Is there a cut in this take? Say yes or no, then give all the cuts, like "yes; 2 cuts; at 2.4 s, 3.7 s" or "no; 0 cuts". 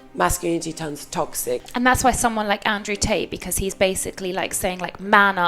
yes; 1 cut; at 1.6 s